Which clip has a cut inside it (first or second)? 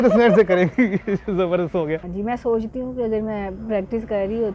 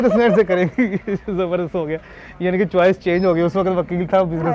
first